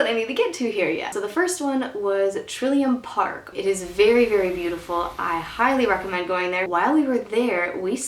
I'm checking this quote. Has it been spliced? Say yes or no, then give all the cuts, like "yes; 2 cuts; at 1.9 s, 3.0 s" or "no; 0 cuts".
yes; 2 cuts; at 3.4 s, 6.7 s